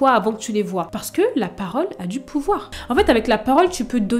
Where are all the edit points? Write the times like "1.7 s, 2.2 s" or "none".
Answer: 0.9 s, 2.8 s